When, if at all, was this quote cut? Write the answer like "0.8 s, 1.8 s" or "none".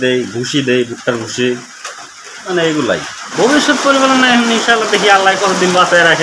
3.3 s